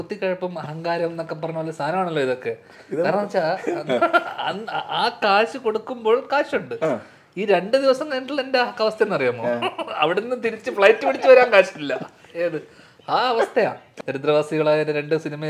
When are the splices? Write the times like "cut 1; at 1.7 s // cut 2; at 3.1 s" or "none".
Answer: cut 1; at 13.9 s

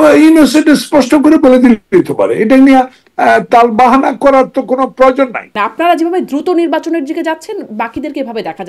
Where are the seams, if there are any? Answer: cut 1; at 5.5 s

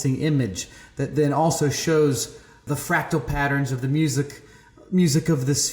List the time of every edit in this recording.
cut 1; at 2.6 s

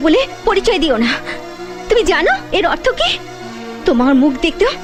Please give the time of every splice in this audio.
none

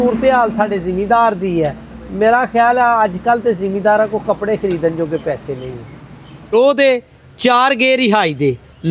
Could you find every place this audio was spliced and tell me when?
cut 1; at 6.5 s

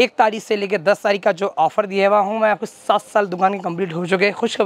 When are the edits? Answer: none

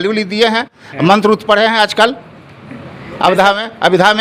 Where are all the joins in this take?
none

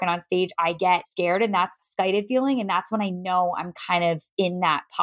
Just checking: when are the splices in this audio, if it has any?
cut 1; at 0.8 s // cut 2; at 1.8 s

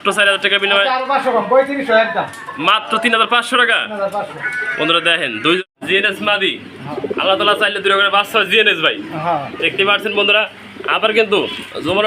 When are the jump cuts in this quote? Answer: cut 1; at 5.6 s

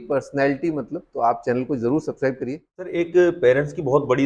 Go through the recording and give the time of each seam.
cut 1; at 2.8 s

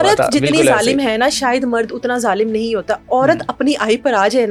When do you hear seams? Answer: none

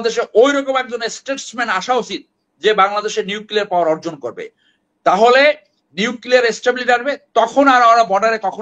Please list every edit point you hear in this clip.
none

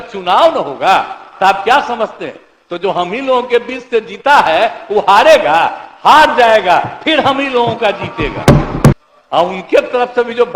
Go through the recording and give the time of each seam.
cut 1; at 9.0 s

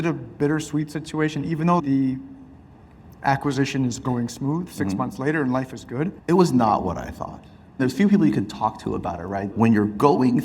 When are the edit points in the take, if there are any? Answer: cut 1; at 6.2 s // cut 2; at 7.8 s // cut 3; at 9.5 s

